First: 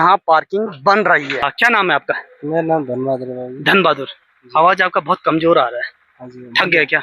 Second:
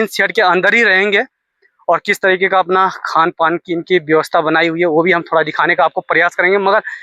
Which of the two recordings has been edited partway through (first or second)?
first